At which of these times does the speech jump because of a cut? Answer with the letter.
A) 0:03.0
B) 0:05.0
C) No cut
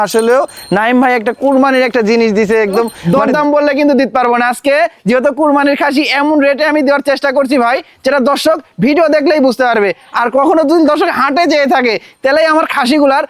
A